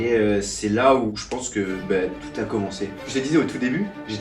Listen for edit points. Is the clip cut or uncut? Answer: cut